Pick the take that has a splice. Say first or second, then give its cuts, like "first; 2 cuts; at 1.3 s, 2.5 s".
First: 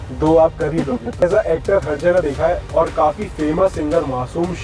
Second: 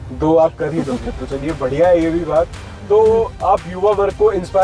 first; 1 cut; at 1.2 s